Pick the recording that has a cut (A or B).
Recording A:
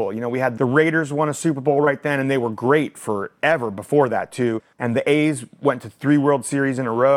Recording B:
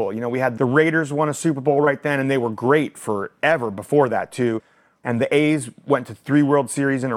A